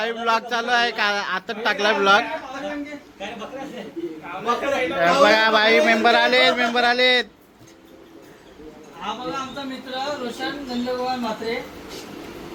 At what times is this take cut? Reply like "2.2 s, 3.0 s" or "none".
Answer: none